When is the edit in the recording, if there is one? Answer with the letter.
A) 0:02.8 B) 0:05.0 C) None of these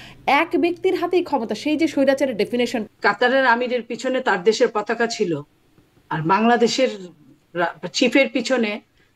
A